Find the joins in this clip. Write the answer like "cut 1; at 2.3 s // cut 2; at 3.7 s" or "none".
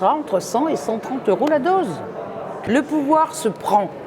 cut 1; at 2.7 s